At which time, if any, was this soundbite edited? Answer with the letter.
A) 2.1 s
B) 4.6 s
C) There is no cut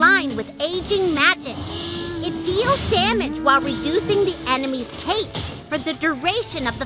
A